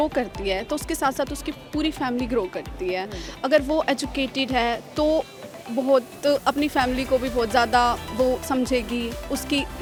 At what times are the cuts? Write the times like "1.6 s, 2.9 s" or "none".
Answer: none